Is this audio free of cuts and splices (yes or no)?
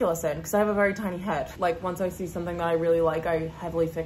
no